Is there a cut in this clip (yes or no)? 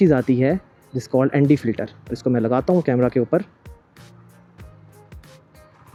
no